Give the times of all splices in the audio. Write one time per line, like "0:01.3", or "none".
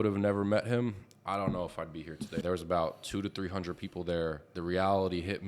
0:02.4
0:04.5

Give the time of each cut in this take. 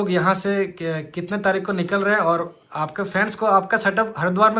none

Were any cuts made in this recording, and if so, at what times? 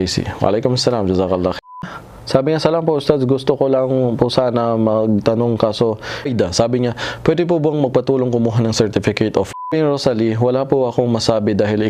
0:01.8
0:06.3
0:09.7

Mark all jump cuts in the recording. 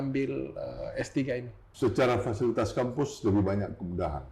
0:01.6

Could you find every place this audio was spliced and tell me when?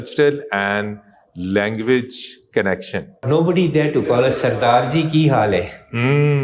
0:03.2

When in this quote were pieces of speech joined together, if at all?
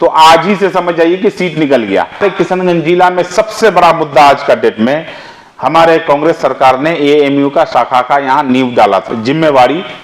0:02.2
0:09.1

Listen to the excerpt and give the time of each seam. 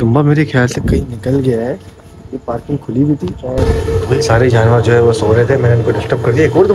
0:03.7

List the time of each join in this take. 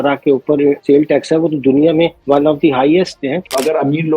0:00.8
0:02.2
0:03.2

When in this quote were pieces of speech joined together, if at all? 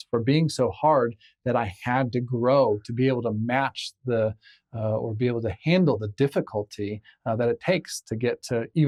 none

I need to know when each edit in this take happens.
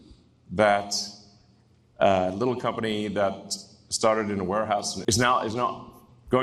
0:04.9

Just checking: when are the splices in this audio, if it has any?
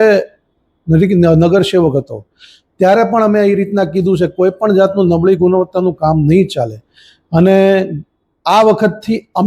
none

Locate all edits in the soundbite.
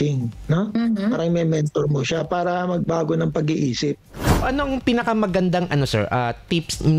0:04.4

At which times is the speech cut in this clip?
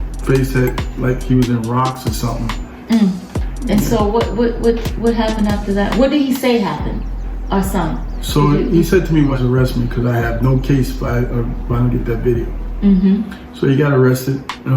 0:09.4

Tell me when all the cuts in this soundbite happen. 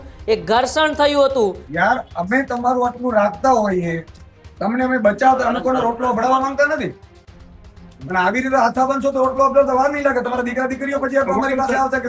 0:01.6

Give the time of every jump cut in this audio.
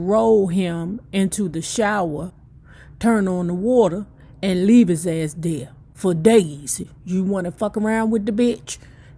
none

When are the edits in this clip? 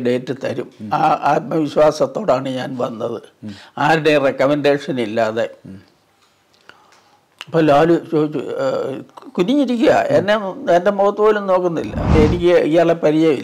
0:12.1

